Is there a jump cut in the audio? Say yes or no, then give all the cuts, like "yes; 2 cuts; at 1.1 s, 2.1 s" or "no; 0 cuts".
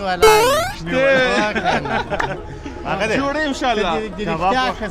no; 0 cuts